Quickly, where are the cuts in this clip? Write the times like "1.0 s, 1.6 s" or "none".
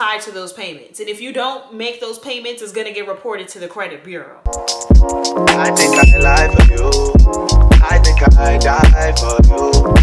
4.5 s